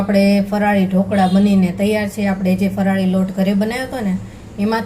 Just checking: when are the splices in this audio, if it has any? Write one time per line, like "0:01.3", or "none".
none